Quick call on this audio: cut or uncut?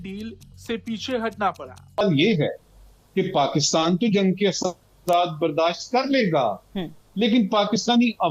cut